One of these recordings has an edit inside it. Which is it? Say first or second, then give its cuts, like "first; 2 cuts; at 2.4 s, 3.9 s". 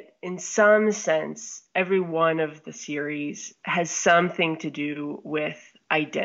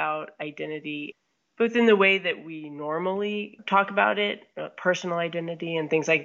second; 2 cuts; at 1.1 s, 3.6 s